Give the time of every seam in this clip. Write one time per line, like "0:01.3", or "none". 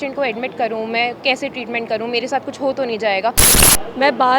0:03.5